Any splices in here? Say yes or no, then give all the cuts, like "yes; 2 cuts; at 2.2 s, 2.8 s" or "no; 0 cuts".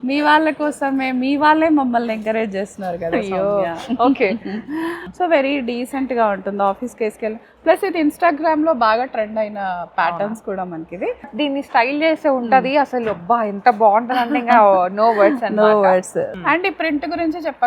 yes; 3 cuts; at 5.0 s, 11.3 s, 16.3 s